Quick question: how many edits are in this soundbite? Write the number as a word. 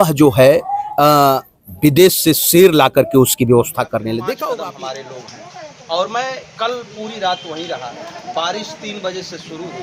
one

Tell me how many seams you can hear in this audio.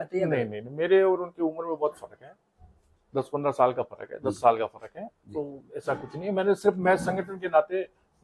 zero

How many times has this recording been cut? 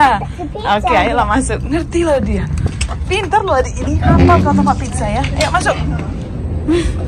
zero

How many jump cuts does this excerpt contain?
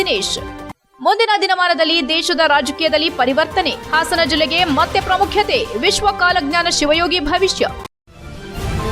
one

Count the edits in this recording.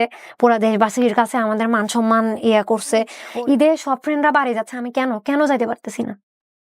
one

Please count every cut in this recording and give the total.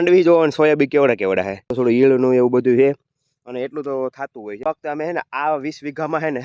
two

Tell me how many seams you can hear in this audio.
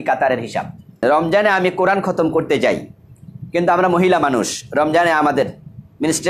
one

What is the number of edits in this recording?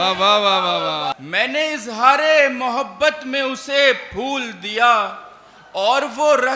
one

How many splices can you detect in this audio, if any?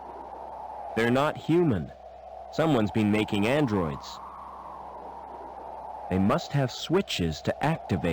three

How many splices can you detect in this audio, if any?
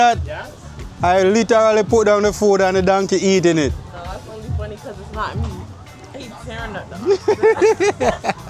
one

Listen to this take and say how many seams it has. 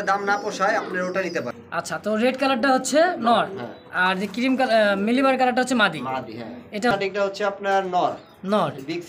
two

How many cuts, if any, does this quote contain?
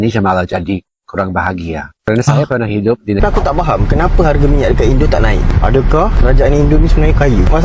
one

